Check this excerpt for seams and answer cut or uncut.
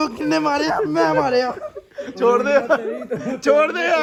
uncut